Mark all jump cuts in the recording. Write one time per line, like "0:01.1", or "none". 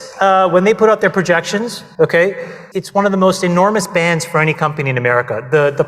0:01.8
0:02.6